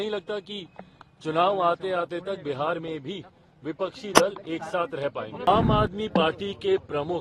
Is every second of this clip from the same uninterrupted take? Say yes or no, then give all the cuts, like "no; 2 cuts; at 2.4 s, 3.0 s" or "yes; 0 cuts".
no; 1 cut; at 5.5 s